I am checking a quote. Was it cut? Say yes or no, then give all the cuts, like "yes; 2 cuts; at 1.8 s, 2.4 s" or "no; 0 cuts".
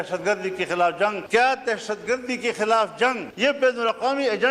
yes; 2 cuts; at 1.2 s, 3.3 s